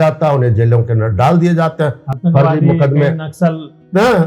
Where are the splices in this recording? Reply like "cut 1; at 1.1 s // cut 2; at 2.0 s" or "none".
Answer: none

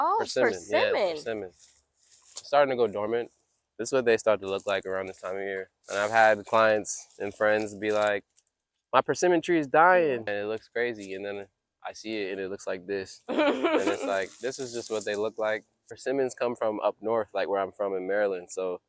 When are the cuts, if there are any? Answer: cut 1; at 5.8 s // cut 2; at 10.3 s // cut 3; at 15.9 s

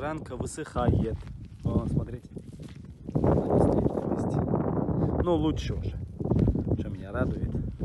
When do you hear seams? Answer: none

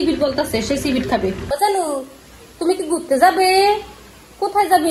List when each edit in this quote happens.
cut 1; at 1.4 s

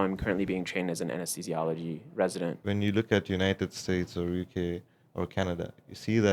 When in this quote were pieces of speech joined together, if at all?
cut 1; at 2.6 s

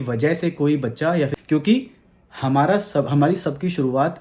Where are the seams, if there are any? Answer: cut 1; at 1.4 s

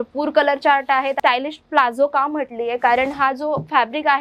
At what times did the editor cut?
cut 1; at 1.2 s

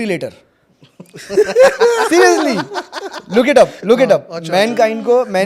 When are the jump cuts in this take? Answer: none

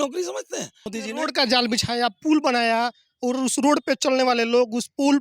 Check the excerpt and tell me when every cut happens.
cut 1; at 0.9 s

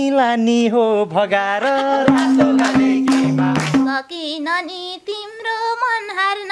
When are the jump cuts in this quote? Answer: cut 1; at 3.9 s

